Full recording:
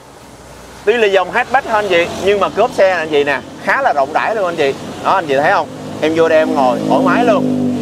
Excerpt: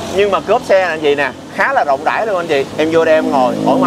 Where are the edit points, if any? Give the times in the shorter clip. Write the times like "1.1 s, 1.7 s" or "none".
2.7 s